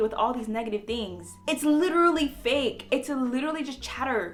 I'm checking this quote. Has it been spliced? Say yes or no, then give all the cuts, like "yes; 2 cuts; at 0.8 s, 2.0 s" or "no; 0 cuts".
no; 0 cuts